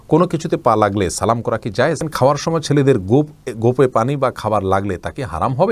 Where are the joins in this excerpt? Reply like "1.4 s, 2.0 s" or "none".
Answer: 2.0 s